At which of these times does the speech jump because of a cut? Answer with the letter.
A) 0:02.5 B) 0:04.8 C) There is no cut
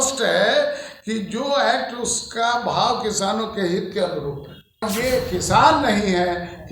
B